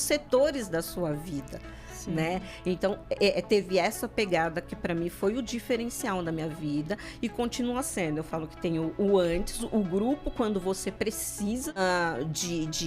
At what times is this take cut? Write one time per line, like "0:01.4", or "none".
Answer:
0:11.8